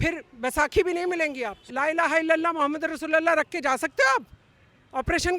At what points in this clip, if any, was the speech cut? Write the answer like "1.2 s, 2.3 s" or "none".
1.6 s